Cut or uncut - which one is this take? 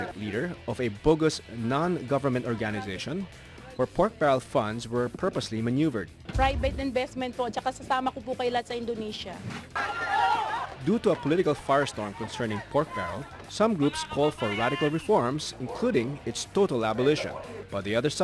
cut